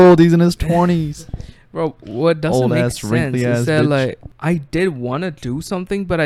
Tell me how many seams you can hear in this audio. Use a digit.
1